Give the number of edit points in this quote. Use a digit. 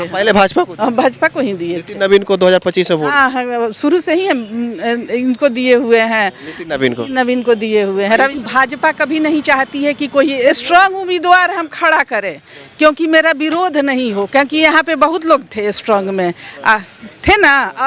2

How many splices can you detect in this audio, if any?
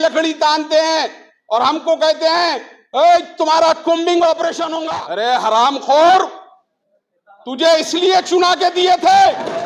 1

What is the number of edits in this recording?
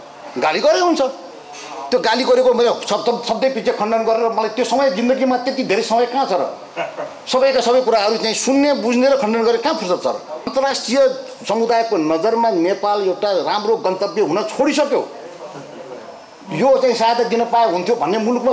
1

